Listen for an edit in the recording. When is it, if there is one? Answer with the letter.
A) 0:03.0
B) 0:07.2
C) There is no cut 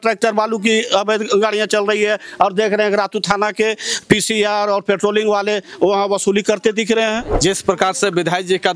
B